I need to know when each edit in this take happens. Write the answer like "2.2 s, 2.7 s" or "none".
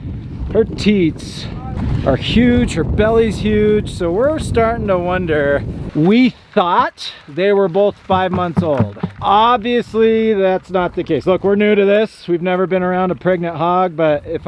5.8 s, 9.1 s